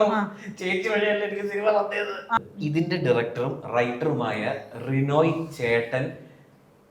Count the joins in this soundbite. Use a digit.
1